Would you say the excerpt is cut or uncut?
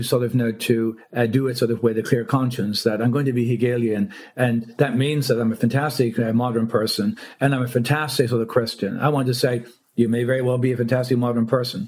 uncut